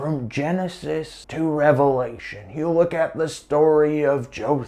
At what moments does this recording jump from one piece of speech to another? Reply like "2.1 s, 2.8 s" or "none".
1.2 s